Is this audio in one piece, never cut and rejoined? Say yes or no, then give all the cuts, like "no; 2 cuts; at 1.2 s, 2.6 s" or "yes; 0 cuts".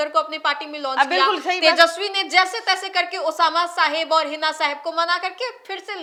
yes; 0 cuts